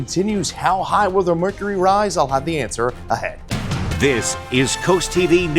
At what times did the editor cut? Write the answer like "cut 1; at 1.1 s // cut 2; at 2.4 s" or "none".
cut 1; at 3.5 s